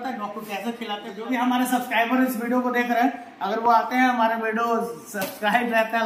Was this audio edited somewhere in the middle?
yes; 1 cut; at 1.1 s

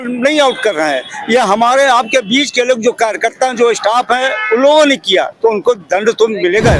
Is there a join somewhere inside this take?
no; 0 cuts

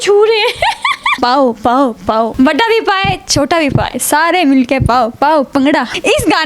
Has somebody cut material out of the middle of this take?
yes; 2 cuts; at 1.2 s, 3.9 s

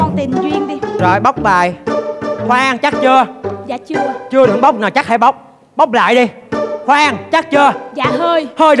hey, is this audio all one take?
yes; 0 cuts

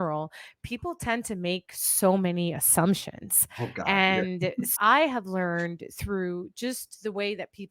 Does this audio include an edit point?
no; 0 cuts

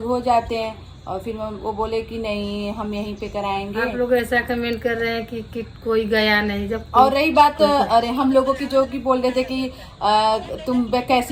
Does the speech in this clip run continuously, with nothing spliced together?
yes; 0 cuts

